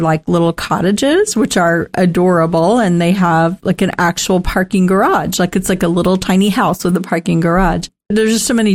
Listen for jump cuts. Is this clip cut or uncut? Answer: uncut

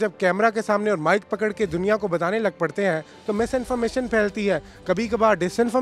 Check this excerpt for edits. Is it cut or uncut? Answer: uncut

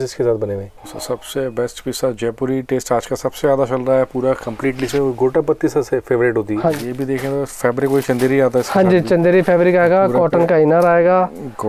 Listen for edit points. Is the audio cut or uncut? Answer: cut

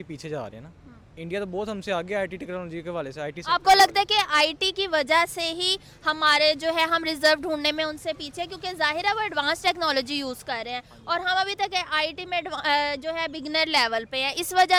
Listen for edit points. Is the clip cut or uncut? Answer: uncut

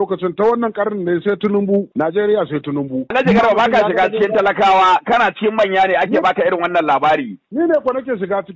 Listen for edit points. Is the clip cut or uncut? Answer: cut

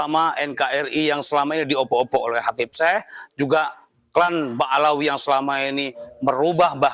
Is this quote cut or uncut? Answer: uncut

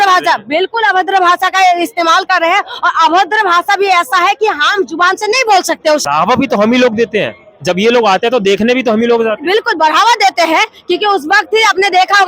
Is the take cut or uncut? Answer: cut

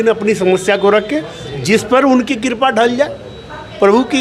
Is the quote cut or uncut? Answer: uncut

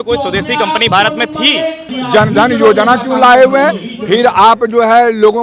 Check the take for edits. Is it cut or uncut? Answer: cut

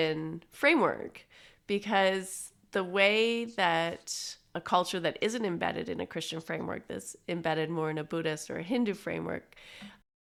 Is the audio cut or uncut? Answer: uncut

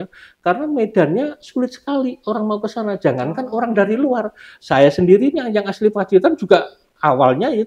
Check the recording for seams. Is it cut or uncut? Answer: uncut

